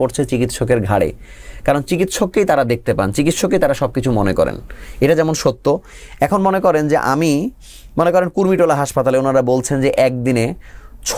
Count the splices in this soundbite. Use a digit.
0